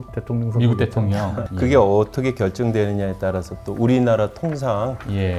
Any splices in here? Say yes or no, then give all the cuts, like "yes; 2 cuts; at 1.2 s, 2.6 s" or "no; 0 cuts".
yes; 1 cut; at 1.4 s